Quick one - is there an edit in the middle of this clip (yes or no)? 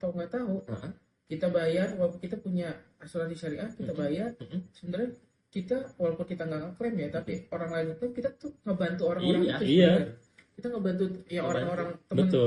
no